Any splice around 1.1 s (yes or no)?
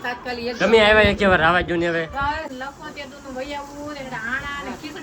no